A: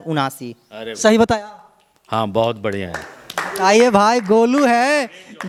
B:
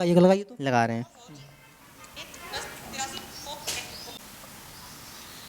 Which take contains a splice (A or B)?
B